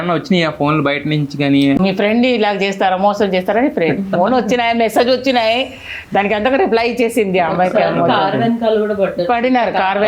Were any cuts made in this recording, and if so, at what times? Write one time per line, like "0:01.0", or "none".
0:01.8